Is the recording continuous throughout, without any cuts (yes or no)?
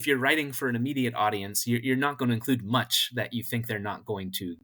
yes